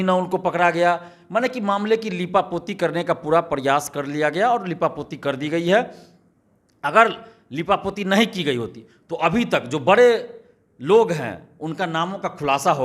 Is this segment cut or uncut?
uncut